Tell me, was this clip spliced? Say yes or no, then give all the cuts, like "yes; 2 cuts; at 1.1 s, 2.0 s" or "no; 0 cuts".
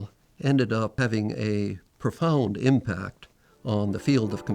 yes; 1 cut; at 0.9 s